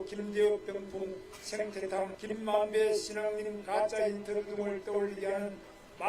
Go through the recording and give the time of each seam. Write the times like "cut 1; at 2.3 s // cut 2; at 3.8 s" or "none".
cut 1; at 2.2 s